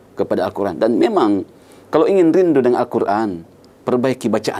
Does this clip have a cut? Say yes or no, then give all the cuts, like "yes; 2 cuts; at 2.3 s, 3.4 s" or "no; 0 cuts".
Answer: no; 0 cuts